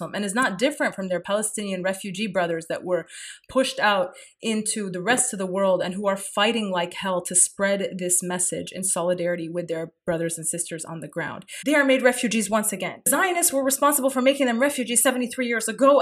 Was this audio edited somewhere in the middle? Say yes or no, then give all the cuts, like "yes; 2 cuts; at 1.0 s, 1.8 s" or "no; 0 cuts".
yes; 2 cuts; at 11.4 s, 13.1 s